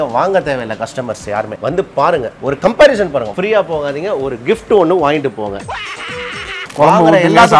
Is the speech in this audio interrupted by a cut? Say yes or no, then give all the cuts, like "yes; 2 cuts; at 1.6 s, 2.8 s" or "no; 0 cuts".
yes; 2 cuts; at 1.5 s, 5.6 s